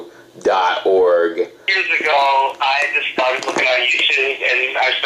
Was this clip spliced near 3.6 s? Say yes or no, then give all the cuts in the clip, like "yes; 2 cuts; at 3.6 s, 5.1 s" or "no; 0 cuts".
yes; 1 cut; at 3.6 s